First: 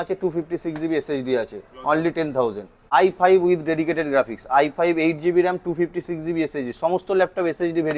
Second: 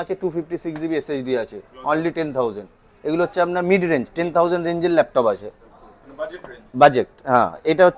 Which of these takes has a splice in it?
first; 1 cut; at 2.7 s

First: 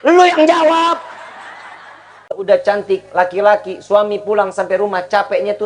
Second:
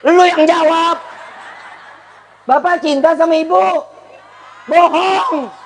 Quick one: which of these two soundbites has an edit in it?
first; 1 cut; at 2.4 s

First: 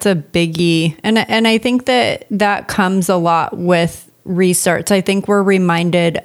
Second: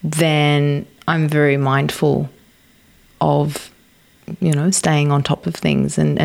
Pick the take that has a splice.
first; 1 cut; at 1.3 s

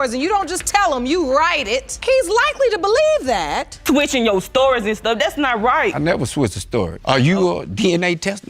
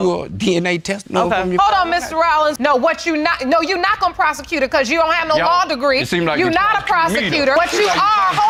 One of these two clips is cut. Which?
first; 1 cut; at 3.8 s

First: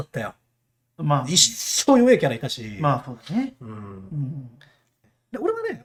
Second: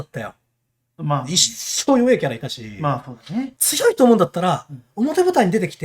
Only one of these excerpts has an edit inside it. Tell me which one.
second; 1 cut; at 3.6 s

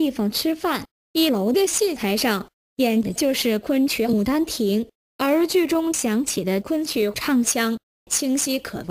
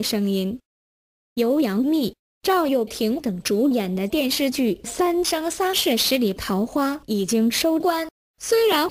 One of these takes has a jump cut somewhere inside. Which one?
second; 1 cut; at 1.2 s

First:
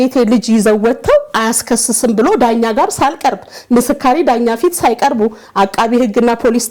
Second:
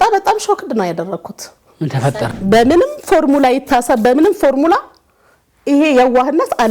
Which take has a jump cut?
second; 1 cut; at 2.1 s

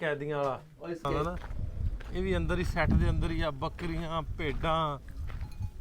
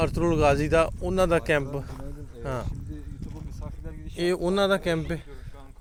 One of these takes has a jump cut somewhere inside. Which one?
first; 1 cut; at 1.2 s

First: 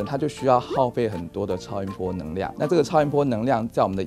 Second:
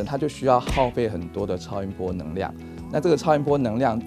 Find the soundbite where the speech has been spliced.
first; 1 cut; at 2.5 s

